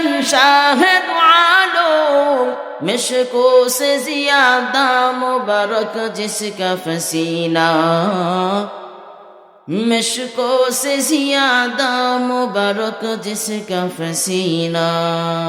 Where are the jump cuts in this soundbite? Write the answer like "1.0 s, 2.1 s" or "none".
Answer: 13.4 s

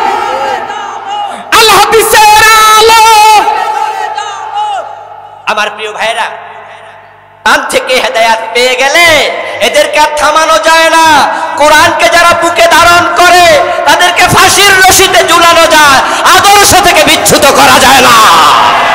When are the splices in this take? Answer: 7.5 s

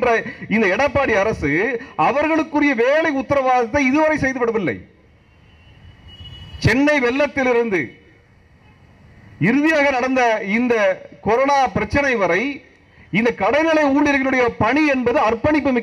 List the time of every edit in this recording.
none

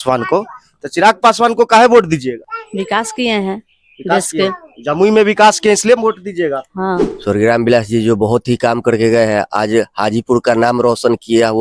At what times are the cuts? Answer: 2.5 s, 7.1 s

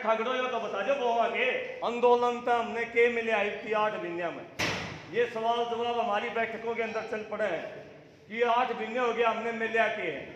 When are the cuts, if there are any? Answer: 1.7 s

